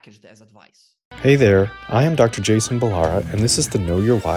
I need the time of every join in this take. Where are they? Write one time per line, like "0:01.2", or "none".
0:01.2

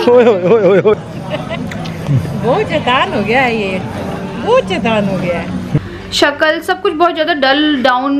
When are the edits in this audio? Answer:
0:00.9
0:05.8

